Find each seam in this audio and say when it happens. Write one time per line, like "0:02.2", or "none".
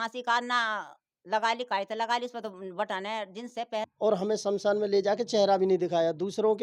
0:03.9